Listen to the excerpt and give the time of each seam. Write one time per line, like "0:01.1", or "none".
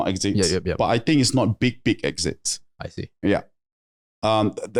none